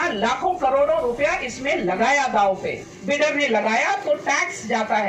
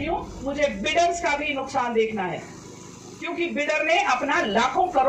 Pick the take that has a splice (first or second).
first